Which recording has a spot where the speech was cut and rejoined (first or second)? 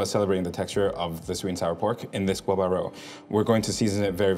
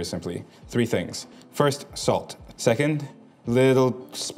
second